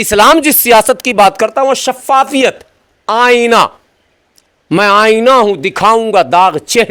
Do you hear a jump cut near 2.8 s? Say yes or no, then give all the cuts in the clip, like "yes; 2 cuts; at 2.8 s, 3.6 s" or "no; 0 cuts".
no; 0 cuts